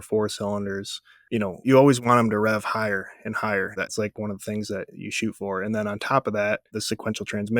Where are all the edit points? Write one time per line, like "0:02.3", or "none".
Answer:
0:01.7
0:03.9
0:06.7